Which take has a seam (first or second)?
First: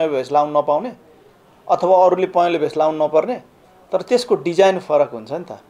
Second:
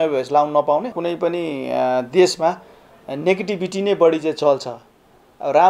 second